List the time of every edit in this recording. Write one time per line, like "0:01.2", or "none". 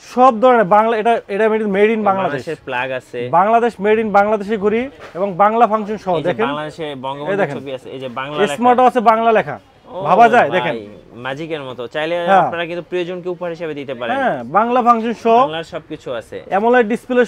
none